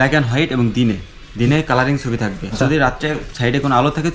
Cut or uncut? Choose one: cut